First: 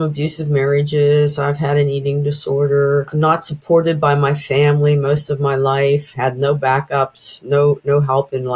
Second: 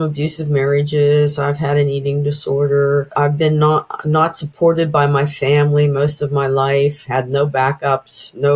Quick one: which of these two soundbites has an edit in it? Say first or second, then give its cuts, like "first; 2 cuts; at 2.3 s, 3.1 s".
first; 1 cut; at 3.1 s